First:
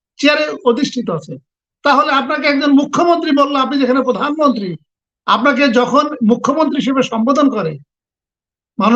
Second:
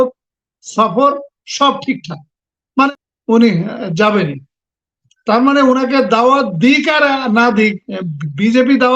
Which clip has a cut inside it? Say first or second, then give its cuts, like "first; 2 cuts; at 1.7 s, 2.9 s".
second; 1 cut; at 2.9 s